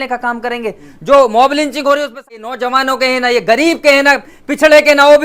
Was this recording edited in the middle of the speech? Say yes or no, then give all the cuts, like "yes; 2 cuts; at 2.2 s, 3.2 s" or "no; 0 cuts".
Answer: yes; 1 cut; at 2.4 s